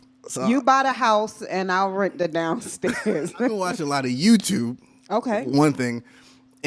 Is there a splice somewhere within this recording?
yes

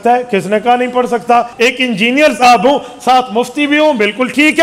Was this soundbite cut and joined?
yes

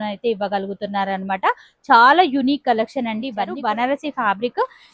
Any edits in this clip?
yes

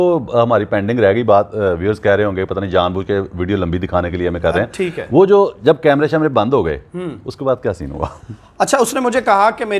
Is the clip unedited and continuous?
yes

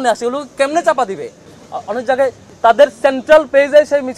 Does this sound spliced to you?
yes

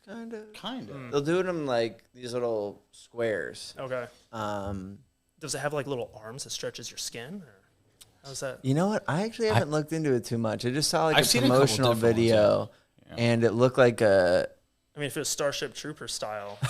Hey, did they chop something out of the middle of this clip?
no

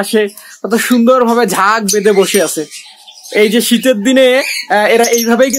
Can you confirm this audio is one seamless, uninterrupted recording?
yes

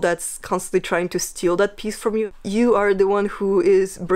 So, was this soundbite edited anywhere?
yes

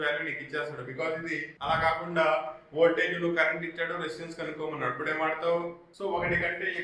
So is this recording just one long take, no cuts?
no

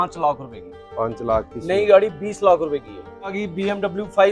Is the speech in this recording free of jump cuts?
no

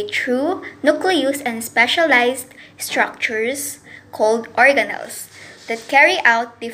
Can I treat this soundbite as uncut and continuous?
yes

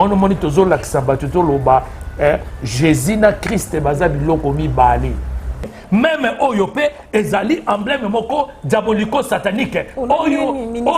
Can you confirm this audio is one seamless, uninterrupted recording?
no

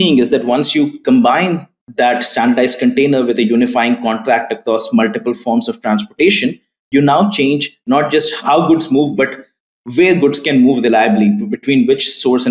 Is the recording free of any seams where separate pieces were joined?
yes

